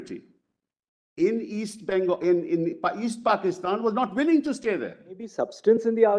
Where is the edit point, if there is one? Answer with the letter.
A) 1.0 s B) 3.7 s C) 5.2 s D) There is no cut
C